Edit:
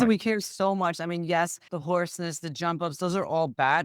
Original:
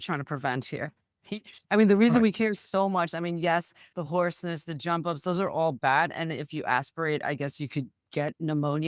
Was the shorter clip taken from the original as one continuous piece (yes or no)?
no